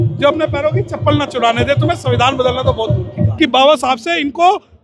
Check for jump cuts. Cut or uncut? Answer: cut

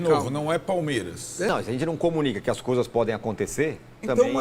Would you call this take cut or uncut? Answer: cut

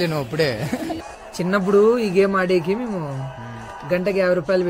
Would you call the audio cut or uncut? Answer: cut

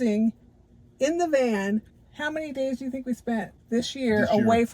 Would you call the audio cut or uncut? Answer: cut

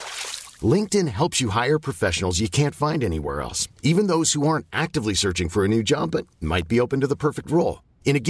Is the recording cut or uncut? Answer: uncut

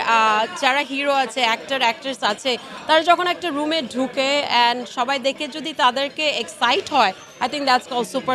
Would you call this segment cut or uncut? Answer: uncut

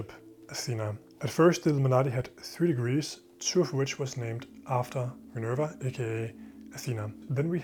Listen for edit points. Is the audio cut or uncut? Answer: uncut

